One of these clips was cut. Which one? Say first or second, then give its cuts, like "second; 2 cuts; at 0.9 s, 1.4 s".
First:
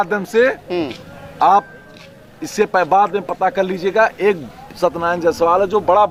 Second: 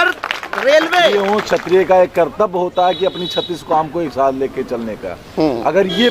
second; 1 cut; at 1.1 s